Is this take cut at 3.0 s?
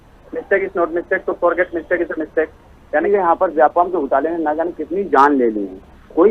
yes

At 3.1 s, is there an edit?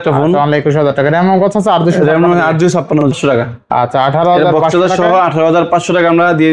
yes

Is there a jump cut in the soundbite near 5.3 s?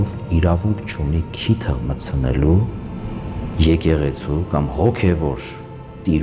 no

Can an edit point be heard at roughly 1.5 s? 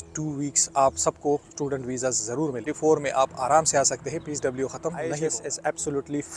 no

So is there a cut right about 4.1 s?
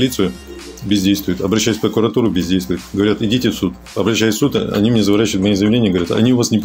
no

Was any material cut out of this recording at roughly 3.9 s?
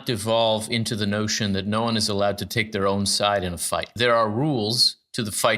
yes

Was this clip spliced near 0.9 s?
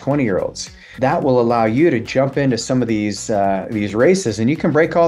yes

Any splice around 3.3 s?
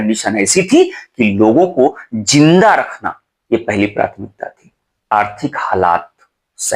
no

